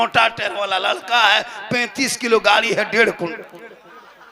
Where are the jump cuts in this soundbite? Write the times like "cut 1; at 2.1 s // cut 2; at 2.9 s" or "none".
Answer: none